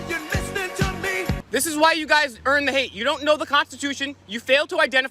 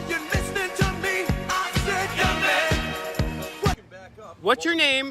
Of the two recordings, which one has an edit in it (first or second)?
first